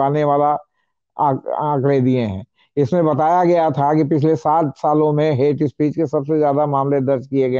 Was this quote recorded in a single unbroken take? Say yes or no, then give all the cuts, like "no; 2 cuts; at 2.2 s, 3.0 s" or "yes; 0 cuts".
yes; 0 cuts